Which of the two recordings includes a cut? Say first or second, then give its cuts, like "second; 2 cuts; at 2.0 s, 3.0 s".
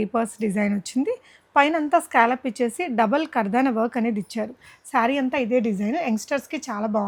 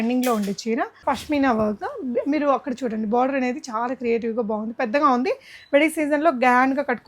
second; 1 cut; at 1.0 s